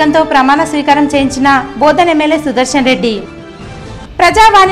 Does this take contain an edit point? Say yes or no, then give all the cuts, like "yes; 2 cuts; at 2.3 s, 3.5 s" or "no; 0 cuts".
no; 0 cuts